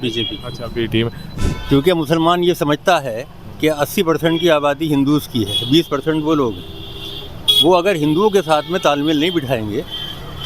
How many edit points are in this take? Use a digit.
1